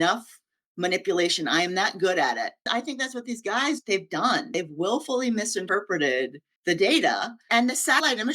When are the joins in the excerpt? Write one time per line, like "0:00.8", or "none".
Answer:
0:02.6
0:06.4
0:07.4